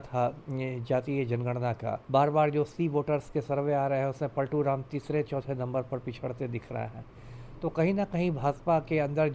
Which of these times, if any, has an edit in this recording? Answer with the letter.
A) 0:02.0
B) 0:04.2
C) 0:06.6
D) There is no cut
A